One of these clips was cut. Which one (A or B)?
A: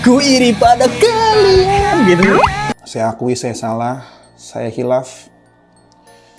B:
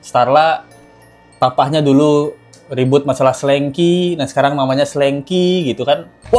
A